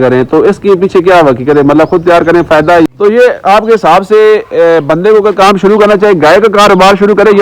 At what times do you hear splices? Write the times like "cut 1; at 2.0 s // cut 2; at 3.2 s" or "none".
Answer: cut 1; at 2.9 s